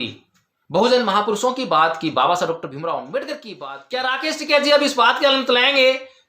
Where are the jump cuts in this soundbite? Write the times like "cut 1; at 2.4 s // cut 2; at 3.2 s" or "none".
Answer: cut 1; at 3.5 s